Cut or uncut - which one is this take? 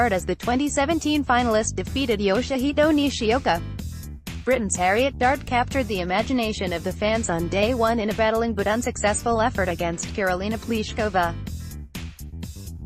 cut